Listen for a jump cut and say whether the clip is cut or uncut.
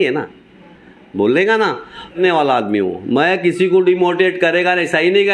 cut